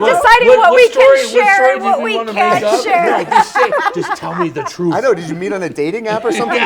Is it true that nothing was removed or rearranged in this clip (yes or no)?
yes